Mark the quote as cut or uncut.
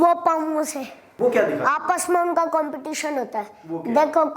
cut